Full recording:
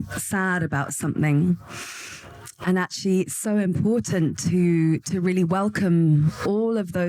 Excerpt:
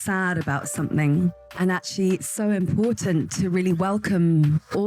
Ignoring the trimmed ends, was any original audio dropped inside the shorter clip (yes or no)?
yes